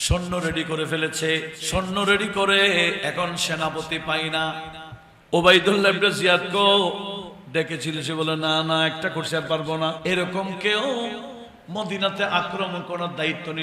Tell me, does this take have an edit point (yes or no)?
yes